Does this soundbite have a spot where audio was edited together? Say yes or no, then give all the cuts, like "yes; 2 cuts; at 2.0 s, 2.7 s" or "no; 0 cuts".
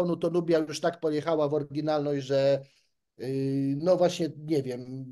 no; 0 cuts